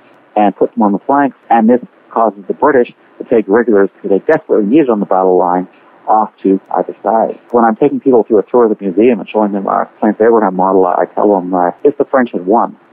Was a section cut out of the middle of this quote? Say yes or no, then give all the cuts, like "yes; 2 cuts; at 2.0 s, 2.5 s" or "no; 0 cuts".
yes; 1 cut; at 11.8 s